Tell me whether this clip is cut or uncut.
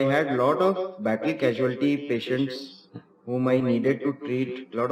uncut